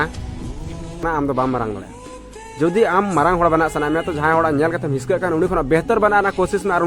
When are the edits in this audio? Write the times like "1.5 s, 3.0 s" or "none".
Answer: 1.0 s